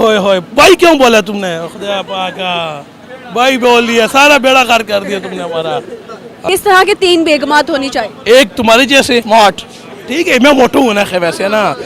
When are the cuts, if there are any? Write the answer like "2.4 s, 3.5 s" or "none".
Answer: 6.3 s, 9.2 s